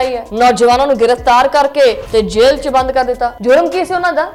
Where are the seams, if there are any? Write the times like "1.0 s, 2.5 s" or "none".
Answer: 2.0 s